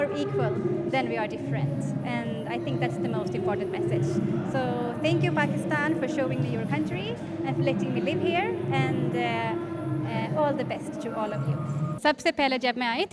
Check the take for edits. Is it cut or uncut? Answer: cut